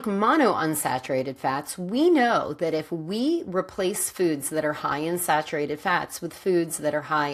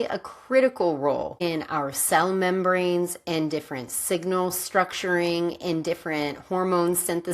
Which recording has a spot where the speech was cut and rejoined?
second; 1 cut; at 1.4 s

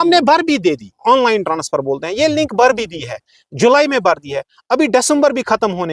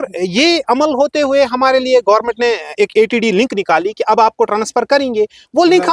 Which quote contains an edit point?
first; 1 cut; at 1.0 s

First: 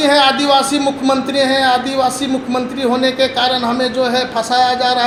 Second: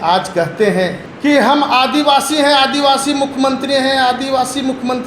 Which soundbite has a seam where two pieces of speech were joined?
second; 1 cut; at 1.1 s

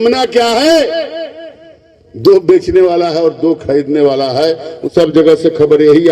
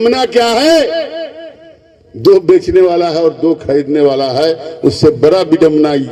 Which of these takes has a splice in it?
first; 1 cut; at 4.7 s

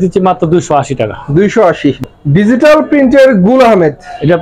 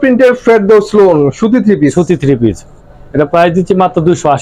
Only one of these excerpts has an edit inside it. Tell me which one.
first; 1 cut; at 2.0 s

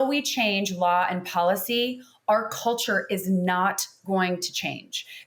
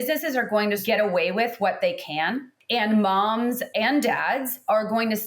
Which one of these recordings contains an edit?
second; 3 cuts; at 0.8 s, 2.5 s, 3.7 s

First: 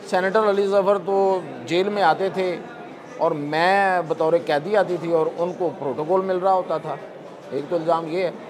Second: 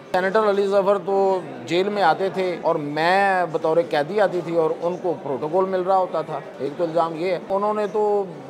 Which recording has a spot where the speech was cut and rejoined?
second; 3 cuts; at 2.6 s, 6.4 s, 7.5 s

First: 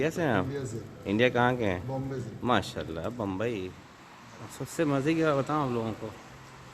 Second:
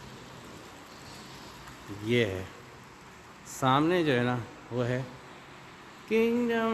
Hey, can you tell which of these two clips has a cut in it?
first; 1 cut; at 3.5 s

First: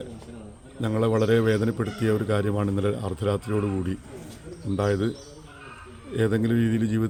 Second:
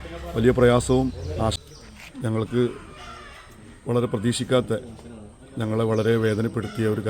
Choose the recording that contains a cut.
second; 1 cut; at 1.6 s

